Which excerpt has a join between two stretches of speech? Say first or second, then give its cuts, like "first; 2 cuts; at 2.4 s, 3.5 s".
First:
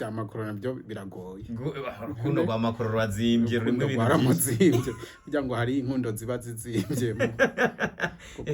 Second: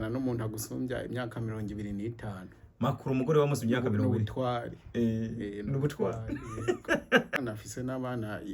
second; 1 cut; at 7.3 s